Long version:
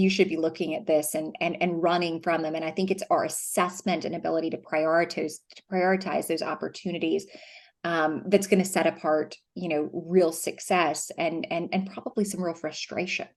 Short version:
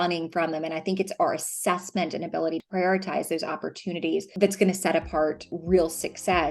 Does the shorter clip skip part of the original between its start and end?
yes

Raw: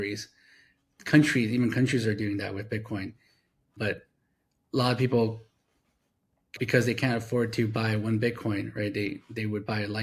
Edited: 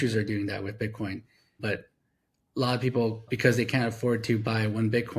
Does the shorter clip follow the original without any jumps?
no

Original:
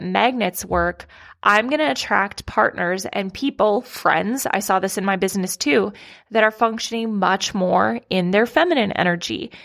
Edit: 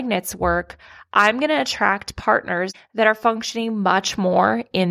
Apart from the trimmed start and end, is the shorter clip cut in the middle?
yes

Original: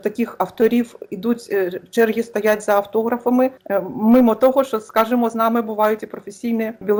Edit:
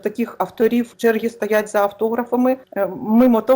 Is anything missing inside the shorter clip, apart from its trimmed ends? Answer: yes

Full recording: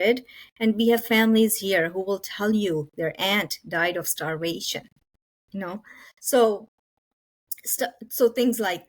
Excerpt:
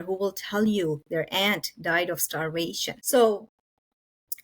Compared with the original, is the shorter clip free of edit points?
no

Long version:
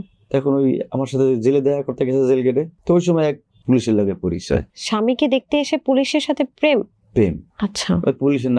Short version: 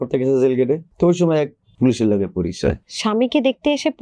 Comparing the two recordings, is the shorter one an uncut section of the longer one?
yes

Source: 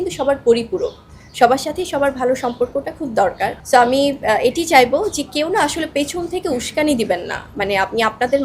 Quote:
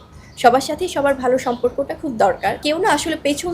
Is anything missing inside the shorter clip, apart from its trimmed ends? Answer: yes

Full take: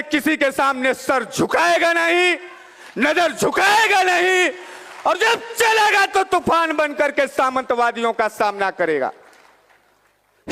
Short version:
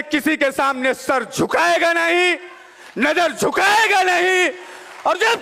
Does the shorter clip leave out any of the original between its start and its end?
no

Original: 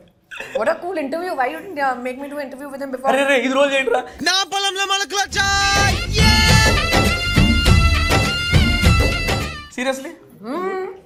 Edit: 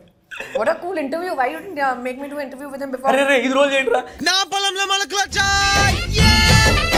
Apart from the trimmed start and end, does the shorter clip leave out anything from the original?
no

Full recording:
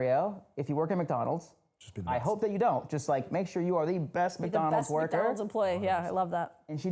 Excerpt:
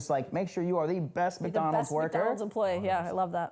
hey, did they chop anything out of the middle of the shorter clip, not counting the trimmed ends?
no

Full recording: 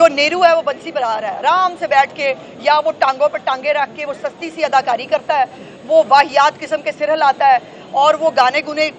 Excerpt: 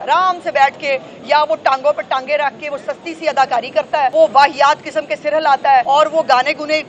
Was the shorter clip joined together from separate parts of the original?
yes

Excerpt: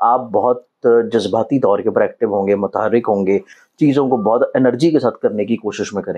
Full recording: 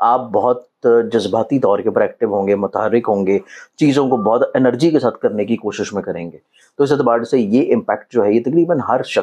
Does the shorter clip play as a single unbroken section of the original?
yes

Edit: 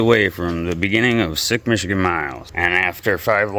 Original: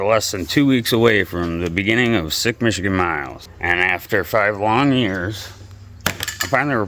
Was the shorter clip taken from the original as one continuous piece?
no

